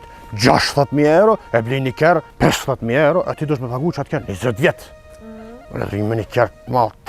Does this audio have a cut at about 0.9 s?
no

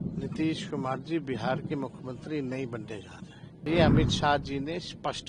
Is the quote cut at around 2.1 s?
no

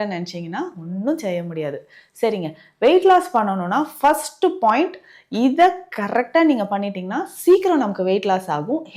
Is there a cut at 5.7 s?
no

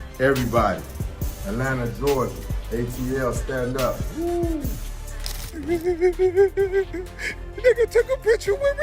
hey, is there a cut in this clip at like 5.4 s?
yes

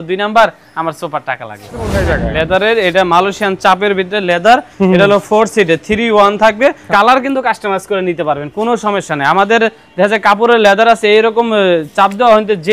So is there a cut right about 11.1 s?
no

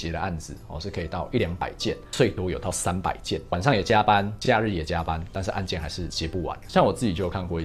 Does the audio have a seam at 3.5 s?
yes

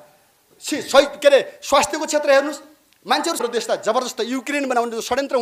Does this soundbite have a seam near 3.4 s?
yes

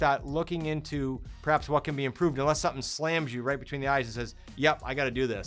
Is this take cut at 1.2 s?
no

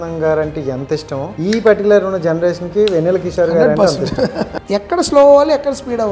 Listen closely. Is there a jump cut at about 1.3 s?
yes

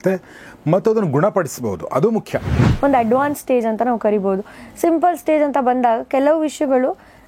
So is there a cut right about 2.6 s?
yes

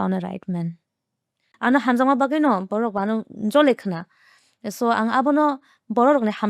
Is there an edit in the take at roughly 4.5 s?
no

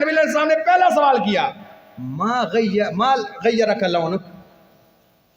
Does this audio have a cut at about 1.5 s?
no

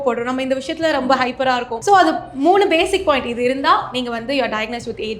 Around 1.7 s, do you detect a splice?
yes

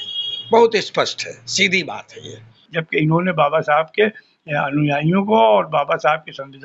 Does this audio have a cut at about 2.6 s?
yes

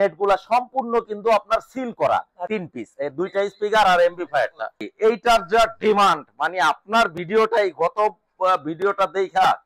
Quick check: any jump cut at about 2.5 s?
yes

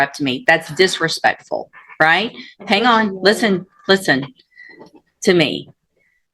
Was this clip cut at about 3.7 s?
no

